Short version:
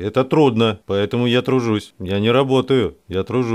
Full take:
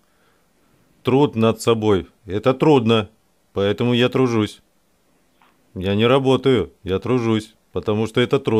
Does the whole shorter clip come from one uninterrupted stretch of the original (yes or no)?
no